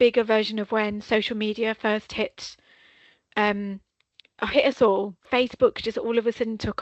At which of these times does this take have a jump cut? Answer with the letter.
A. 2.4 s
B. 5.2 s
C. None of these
B